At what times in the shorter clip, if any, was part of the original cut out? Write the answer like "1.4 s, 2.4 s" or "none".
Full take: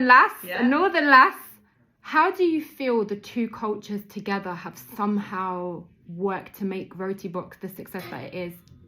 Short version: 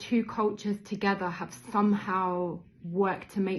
none